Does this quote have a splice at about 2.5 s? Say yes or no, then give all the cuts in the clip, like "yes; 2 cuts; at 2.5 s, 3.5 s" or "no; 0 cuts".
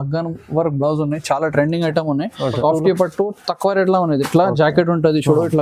yes; 1 cut; at 2.5 s